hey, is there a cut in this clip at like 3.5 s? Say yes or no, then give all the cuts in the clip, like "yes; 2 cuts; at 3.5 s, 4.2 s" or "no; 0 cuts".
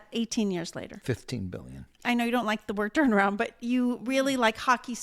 no; 1 cut; at 1.8 s